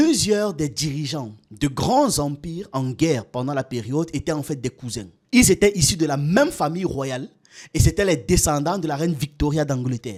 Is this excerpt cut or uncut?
uncut